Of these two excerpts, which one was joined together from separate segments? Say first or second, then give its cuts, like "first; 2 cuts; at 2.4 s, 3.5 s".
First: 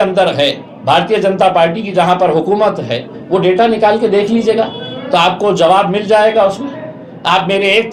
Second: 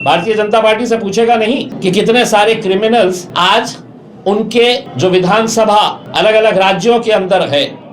second; 4 cuts; at 1.7 s, 3.3 s, 4.9 s, 6.0 s